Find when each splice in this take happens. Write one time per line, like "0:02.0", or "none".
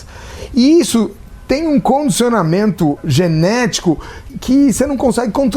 0:03.0
0:04.3